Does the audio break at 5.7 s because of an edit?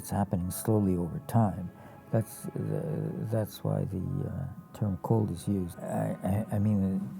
yes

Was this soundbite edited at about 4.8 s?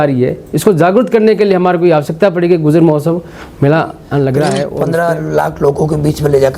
yes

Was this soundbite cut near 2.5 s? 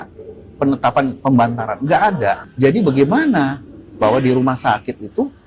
yes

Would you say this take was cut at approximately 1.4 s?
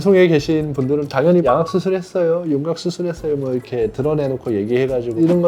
yes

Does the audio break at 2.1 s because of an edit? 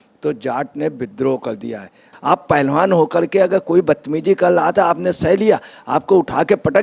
yes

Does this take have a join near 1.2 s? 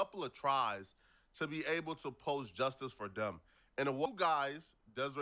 no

